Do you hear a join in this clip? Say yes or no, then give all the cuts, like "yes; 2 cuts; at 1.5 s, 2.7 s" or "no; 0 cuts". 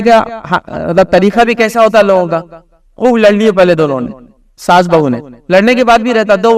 no; 0 cuts